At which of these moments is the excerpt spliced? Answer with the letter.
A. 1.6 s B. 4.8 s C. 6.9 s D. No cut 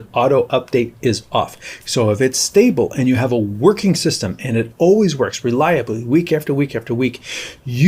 A